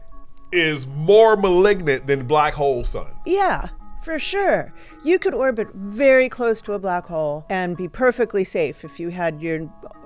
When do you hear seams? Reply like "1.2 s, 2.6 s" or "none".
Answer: 7.4 s